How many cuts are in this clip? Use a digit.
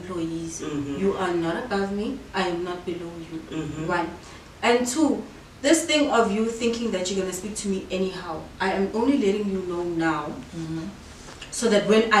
0